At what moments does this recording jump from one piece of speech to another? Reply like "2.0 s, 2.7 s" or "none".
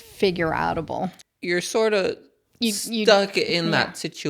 1.2 s

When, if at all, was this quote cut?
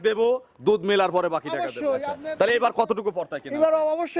2.2 s

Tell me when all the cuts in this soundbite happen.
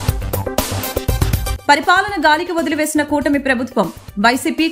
none

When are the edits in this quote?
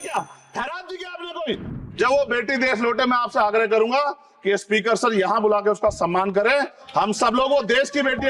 1.9 s

